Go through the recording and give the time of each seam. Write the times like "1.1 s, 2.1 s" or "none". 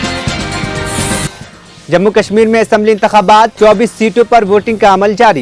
1.3 s